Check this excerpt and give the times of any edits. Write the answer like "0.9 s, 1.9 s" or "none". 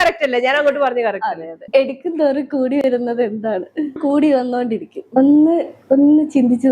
1.5 s, 4.0 s, 5.0 s